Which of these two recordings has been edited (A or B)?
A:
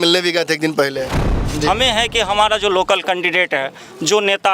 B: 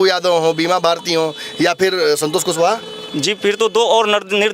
A